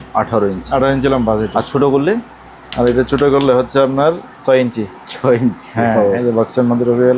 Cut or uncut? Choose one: uncut